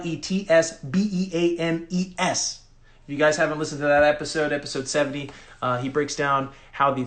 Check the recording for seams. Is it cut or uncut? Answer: uncut